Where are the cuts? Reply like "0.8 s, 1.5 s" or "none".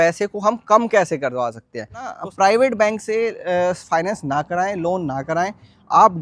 2.2 s